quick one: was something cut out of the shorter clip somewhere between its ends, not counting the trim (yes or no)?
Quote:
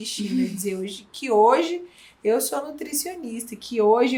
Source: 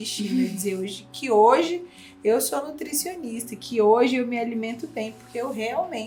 no